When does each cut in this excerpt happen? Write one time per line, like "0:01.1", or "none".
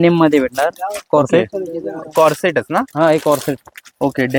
none